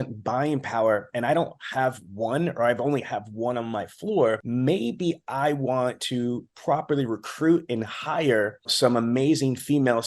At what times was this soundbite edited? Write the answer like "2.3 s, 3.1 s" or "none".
4.4 s, 8.7 s

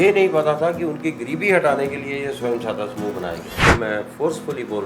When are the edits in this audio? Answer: 3.7 s

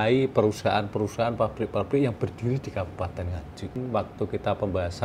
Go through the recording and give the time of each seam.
3.8 s

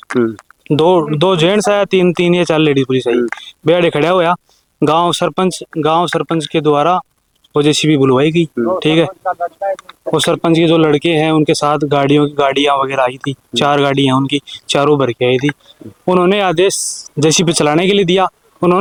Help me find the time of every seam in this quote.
none

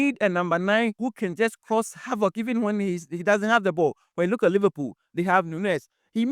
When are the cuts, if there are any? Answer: 1.0 s

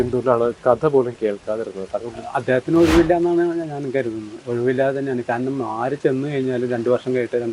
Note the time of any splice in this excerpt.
none

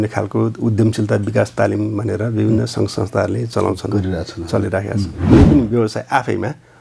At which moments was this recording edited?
5.2 s

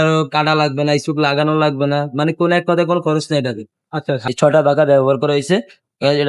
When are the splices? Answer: 4.2 s

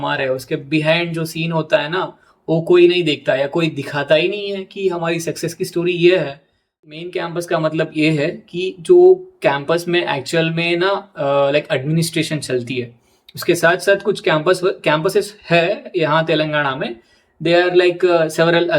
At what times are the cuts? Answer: 6.9 s

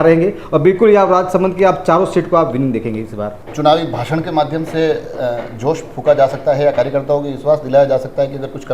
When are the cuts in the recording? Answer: 3.4 s

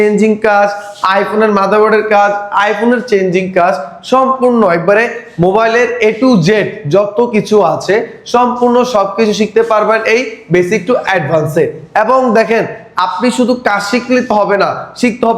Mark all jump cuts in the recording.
none

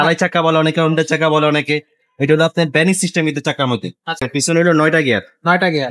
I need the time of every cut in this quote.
4.2 s

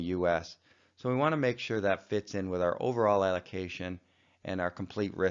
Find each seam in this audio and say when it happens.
1.4 s

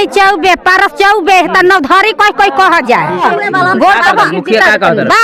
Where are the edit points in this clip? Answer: 3.2 s

